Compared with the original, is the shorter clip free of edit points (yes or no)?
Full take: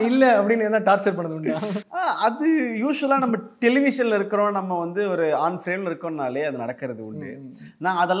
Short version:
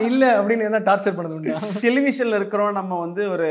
no